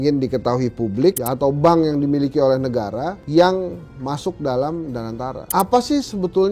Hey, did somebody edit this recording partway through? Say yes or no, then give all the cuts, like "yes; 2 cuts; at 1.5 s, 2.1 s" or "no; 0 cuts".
yes; 2 cuts; at 1.2 s, 5.4 s